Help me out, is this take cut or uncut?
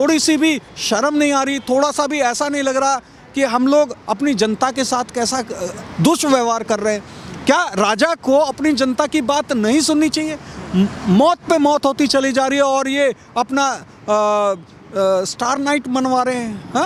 uncut